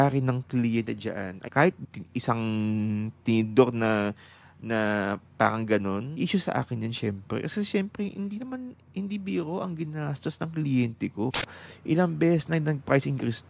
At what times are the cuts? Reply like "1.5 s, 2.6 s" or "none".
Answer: 1.4 s, 6.1 s, 11.6 s